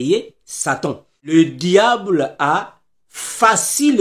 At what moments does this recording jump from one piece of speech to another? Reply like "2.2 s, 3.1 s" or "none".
1.3 s